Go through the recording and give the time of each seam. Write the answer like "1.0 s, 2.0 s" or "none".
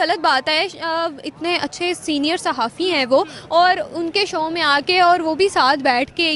none